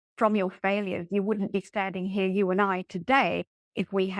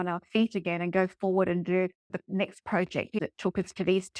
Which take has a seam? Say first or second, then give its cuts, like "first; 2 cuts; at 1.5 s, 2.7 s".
second; 2 cuts; at 2.1 s, 3.2 s